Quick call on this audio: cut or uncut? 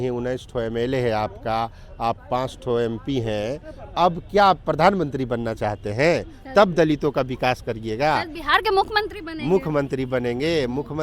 uncut